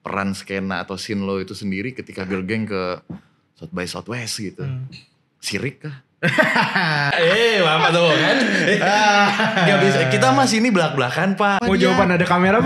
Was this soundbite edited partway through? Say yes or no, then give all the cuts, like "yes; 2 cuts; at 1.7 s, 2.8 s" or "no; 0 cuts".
yes; 2 cuts; at 7.1 s, 11.6 s